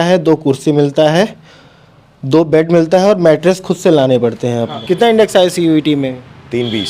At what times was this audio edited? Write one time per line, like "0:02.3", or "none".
0:04.7